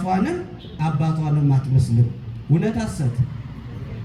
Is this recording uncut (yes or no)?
yes